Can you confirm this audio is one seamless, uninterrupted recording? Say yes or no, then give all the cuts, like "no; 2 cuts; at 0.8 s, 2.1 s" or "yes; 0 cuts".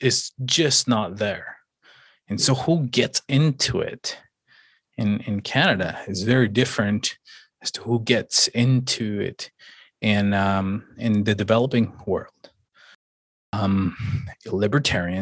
no; 1 cut; at 13.3 s